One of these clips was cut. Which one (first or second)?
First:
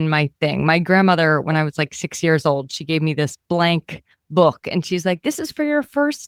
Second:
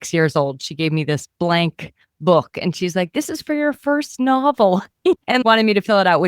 second